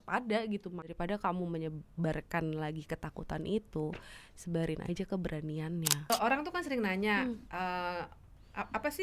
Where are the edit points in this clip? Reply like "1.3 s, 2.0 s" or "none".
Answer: 0.9 s, 6.1 s